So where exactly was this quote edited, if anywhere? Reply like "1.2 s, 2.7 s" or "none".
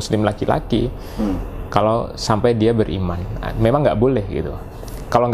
none

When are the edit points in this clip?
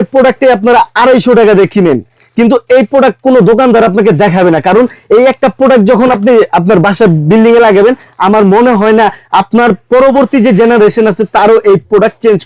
none

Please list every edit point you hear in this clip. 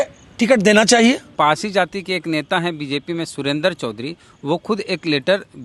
1.3 s

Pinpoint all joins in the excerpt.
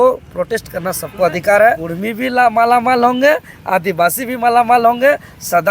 1.9 s

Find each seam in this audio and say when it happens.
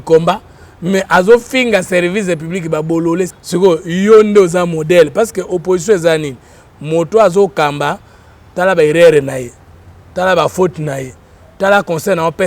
3.4 s

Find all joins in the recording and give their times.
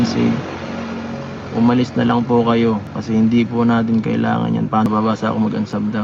4.9 s

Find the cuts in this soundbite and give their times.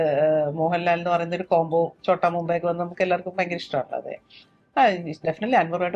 none

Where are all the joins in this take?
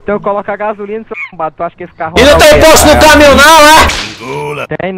none

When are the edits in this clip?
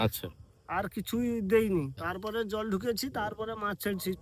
1.9 s

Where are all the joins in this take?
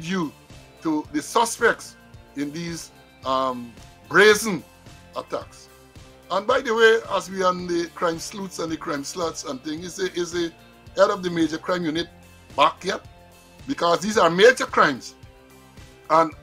none

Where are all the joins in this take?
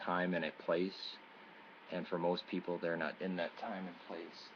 none

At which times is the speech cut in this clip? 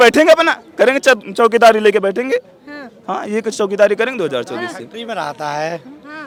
none

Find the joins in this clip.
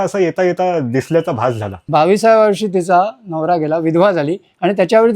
1.7 s

